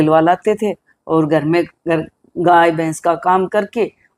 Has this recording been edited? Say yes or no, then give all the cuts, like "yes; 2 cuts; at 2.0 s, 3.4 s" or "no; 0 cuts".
no; 0 cuts